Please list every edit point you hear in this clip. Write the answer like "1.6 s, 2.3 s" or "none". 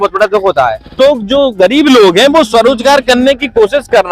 1.0 s

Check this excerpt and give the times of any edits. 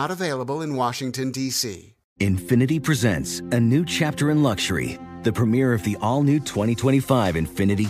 2.0 s

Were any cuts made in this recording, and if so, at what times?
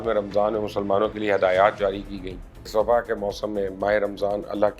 2.7 s

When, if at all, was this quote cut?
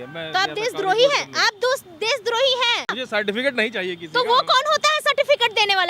3.0 s

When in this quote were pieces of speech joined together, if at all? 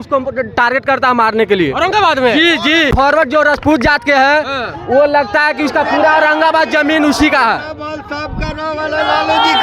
2.9 s

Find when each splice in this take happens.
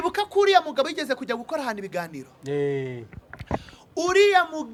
none

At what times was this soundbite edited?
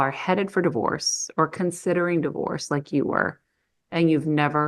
none

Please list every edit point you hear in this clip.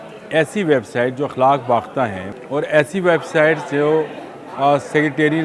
2.2 s

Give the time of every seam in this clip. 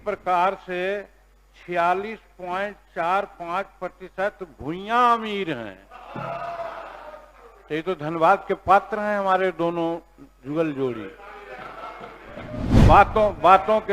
12.7 s

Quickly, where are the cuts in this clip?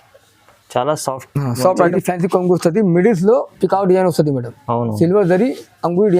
1.9 s

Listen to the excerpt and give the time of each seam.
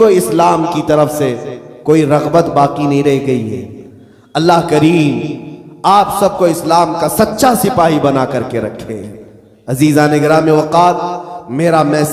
none

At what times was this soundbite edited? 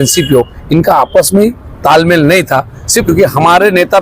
3.0 s

